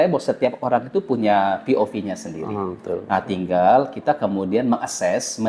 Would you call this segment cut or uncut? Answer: uncut